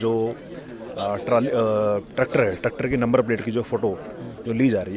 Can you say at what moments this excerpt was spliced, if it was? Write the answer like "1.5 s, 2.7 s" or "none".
none